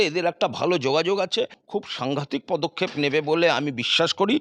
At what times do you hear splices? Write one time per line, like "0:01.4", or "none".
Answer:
0:01.6

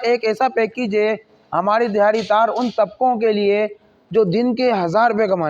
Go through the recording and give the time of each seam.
none

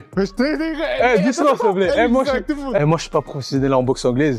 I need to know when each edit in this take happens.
none

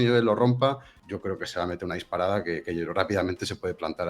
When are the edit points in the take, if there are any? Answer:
0:00.9

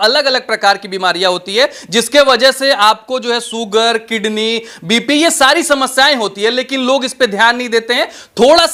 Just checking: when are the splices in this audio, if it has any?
none

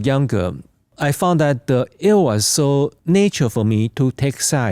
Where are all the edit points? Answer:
0:00.9
0:03.0

